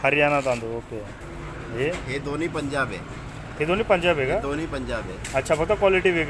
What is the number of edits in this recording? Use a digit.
1